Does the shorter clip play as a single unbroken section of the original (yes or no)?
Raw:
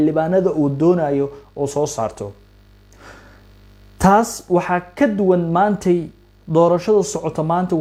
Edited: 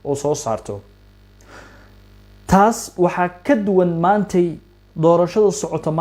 yes